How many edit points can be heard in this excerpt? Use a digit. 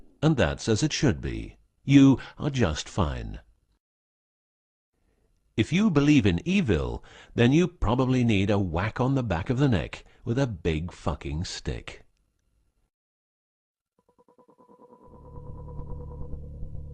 1